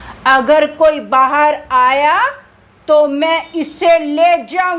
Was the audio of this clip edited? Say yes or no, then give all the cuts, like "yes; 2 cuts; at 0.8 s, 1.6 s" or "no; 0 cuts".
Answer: no; 0 cuts